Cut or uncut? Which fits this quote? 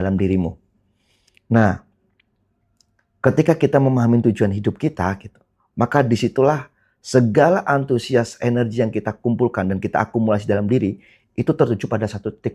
uncut